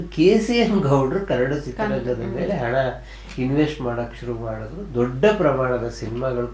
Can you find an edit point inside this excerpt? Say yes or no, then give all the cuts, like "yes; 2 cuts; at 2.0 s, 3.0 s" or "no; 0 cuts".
no; 0 cuts